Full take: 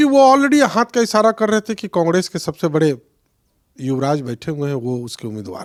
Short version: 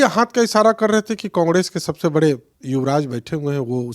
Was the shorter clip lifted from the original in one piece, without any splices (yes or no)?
no